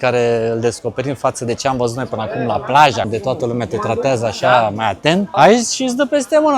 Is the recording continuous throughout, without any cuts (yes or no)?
no